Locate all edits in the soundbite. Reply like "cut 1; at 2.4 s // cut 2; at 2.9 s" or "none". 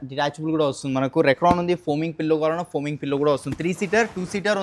none